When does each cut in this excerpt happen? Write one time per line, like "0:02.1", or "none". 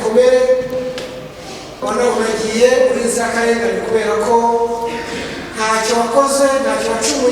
0:01.8